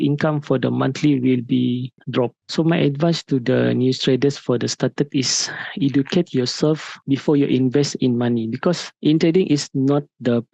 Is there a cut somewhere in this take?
yes; 1 cut; at 2.4 s

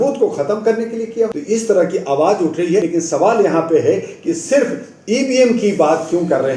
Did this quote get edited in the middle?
yes; 2 cuts; at 1.3 s, 2.9 s

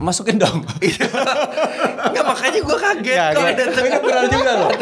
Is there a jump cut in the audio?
no; 0 cuts

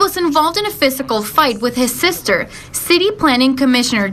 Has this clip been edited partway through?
yes; 2 cuts; at 1.0 s, 2.8 s

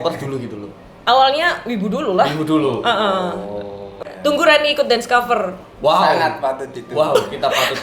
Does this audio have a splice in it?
yes; 1 cut; at 3.9 s

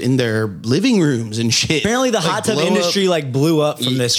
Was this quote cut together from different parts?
yes; 1 cut; at 1.8 s

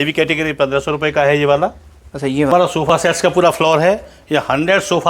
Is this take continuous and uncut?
no; 1 cut; at 2.5 s

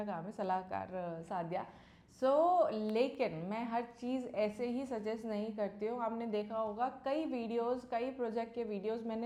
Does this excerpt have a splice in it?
no; 0 cuts

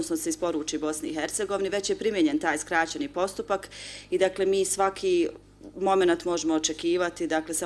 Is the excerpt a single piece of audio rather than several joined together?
no; 1 cut; at 1.6 s

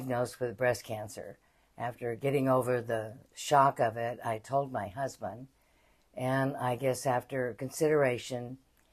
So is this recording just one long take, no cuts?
yes; 0 cuts

